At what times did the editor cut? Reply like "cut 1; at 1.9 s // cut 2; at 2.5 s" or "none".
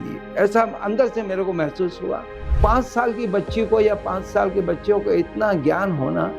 cut 1; at 2.5 s